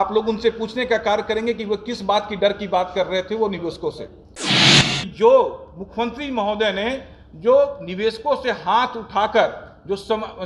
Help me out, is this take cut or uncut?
cut